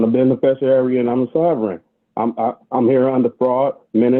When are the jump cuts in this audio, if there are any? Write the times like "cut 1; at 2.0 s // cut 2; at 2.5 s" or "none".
none